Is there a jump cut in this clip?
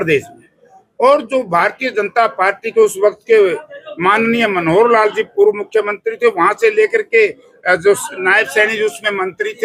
no; 0 cuts

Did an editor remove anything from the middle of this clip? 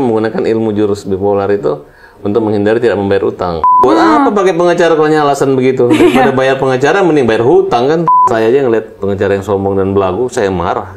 yes; 2 cuts; at 3.8 s, 8.0 s

